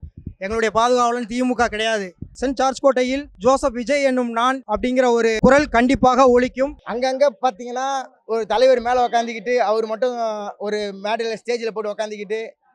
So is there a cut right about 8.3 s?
no; 4 cuts; at 2.3 s, 3.3 s, 4.8 s, 6.8 s

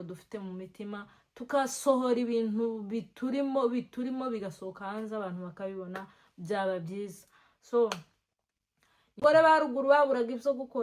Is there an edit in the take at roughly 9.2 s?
yes; 1 cut; at 9.2 s

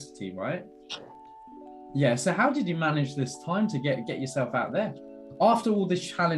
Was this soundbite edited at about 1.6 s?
no; 1 cut; at 5.2 s

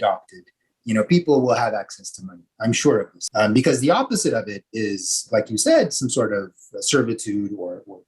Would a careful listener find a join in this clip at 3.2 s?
yes; 1 cut; at 3.2 s

